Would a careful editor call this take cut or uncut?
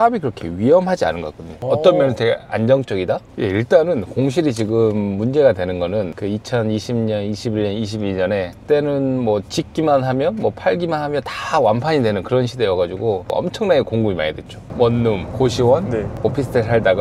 cut